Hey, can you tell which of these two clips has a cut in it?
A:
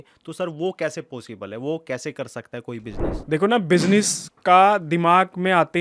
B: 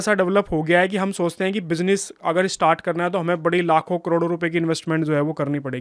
A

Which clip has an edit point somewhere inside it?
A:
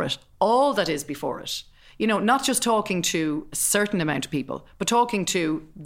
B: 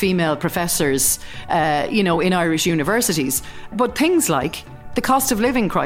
B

